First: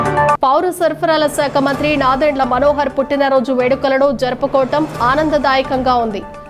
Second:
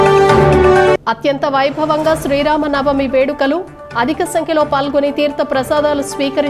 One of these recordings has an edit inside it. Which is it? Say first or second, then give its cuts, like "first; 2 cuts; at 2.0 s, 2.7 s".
second; 1 cut; at 0.9 s